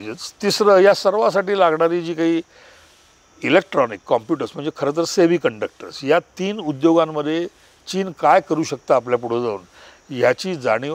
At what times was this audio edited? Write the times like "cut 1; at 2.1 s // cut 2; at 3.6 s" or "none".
none